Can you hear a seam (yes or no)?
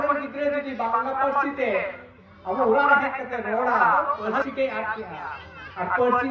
yes